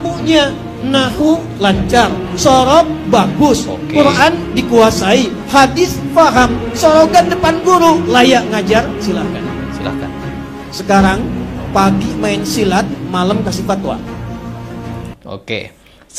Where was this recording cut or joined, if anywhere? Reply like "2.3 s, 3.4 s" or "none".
15.2 s